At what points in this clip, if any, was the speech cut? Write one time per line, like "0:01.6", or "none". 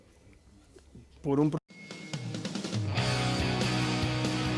none